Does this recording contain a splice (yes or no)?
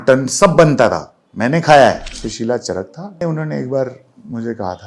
yes